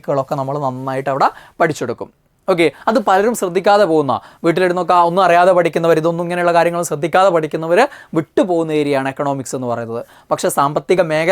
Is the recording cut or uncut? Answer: uncut